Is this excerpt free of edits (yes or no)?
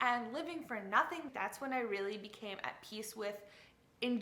no